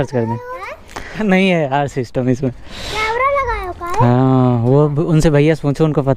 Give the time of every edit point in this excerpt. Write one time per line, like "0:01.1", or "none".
0:01.1